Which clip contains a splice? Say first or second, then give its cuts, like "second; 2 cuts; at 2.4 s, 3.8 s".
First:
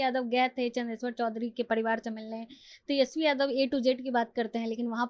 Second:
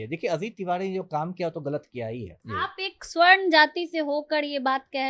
second; 1 cut; at 2.4 s